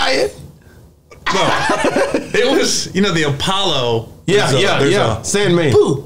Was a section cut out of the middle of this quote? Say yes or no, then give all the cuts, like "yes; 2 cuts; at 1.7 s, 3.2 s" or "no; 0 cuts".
no; 0 cuts